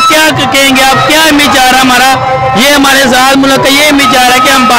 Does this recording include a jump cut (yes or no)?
no